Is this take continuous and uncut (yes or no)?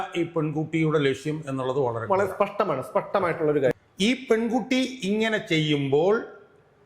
no